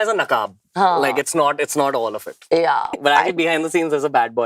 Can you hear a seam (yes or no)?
yes